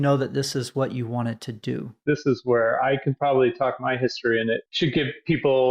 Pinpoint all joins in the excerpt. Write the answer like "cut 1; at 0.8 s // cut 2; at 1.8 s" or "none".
cut 1; at 2.0 s